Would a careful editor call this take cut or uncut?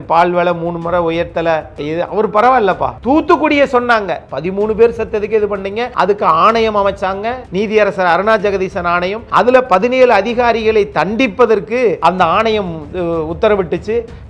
cut